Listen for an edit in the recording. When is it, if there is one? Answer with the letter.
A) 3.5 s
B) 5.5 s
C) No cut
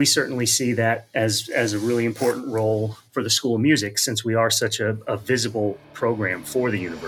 C